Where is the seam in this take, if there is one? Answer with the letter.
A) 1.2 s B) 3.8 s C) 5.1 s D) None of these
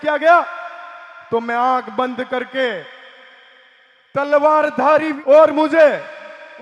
C